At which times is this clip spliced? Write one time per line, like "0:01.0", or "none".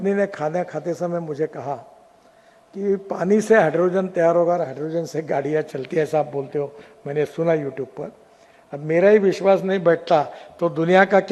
none